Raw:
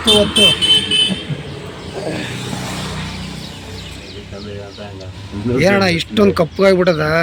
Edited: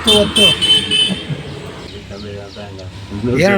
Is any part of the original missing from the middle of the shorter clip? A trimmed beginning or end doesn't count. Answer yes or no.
yes